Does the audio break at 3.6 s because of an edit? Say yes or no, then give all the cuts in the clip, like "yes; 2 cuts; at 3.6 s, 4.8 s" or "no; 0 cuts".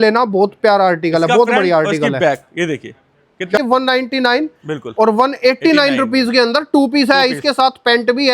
yes; 1 cut; at 3.6 s